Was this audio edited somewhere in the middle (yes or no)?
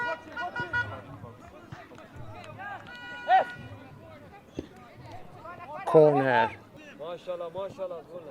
yes